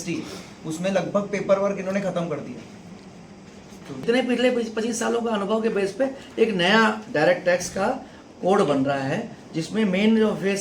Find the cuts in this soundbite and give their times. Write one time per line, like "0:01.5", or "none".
0:04.0